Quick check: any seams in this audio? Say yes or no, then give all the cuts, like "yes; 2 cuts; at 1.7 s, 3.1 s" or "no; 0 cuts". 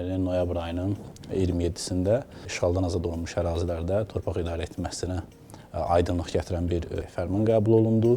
yes; 2 cuts; at 2.5 s, 7.0 s